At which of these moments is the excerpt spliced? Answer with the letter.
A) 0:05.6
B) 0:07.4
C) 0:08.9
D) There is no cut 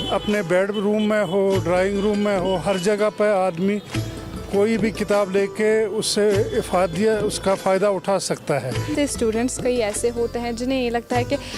C